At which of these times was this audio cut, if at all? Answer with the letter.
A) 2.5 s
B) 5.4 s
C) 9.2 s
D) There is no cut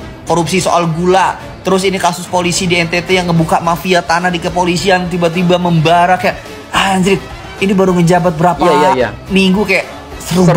D